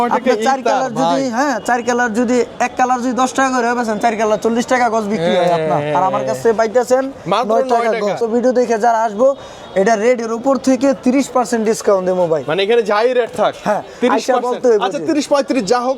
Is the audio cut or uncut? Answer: cut